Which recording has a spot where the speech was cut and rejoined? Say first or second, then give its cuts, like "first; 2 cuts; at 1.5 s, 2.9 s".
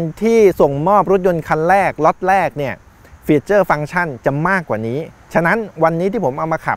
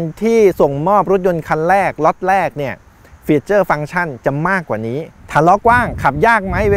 second; 1 cut; at 5.2 s